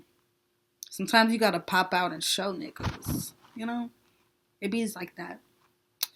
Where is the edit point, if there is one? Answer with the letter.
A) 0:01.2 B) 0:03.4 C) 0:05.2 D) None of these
D